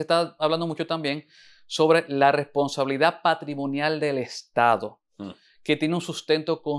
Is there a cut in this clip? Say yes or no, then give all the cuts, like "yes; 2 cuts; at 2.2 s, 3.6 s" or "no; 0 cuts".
no; 0 cuts